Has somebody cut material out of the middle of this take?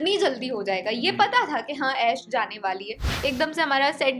yes; 1 cut; at 3.1 s

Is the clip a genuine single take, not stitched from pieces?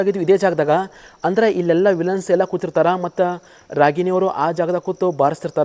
yes; 0 cuts

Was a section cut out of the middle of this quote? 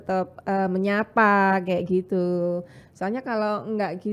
no; 0 cuts

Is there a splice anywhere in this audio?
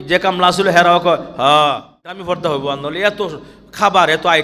yes; 1 cut; at 2.2 s

